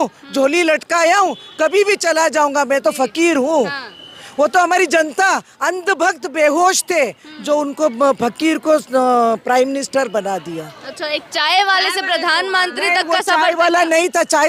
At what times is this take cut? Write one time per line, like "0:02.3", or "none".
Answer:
none